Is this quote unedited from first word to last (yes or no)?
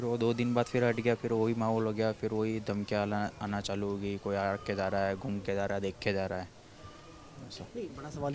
yes